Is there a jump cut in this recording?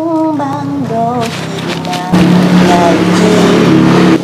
yes; 1 cut; at 2.1 s

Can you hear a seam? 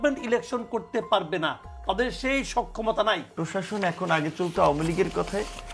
yes; 1 cut; at 3.3 s

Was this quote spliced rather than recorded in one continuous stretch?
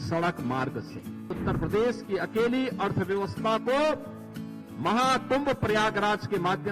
yes; 1 cut; at 1.4 s

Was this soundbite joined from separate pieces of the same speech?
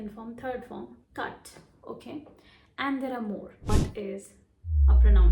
yes; 1 cut; at 3.7 s

